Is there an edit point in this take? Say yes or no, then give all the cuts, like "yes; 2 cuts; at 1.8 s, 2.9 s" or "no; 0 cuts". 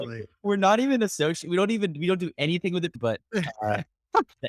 yes; 1 cut; at 3.0 s